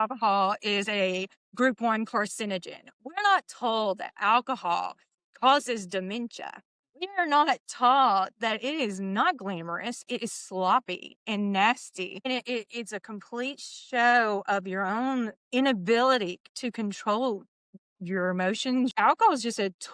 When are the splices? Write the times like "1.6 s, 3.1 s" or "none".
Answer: 18.9 s